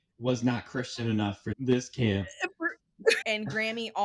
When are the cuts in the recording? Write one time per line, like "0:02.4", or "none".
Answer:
0:01.5
0:03.2

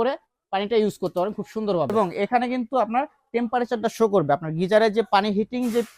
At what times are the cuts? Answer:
0:01.9

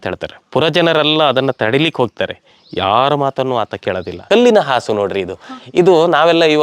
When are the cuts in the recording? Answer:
0:04.2

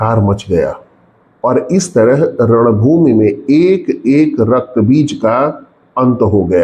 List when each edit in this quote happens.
none

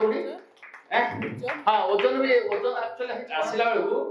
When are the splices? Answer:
none

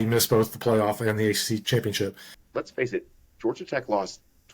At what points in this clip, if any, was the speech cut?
0:01.6
0:02.4

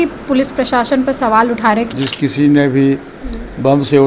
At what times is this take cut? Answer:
0:01.9

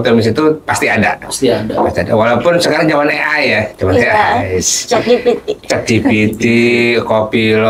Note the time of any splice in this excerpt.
none

